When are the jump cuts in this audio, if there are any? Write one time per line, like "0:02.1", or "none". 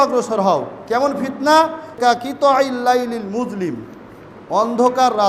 0:02.2